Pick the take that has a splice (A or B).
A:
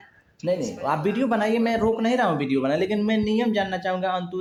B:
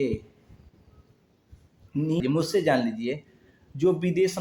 B